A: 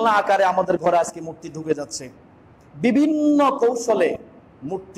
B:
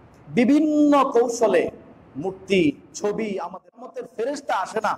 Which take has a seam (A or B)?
B